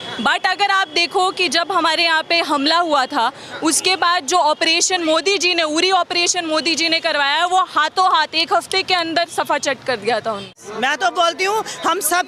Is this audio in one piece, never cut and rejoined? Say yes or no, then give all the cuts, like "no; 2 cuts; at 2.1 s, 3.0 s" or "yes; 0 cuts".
no; 1 cut; at 10.6 s